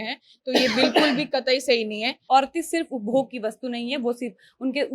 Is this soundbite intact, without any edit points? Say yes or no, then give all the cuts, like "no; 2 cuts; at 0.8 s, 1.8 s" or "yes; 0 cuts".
no; 1 cut; at 2.1 s